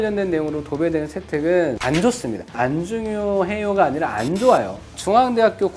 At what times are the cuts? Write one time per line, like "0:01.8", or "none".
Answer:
0:02.0